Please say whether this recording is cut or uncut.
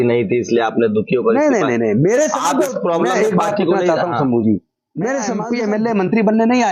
cut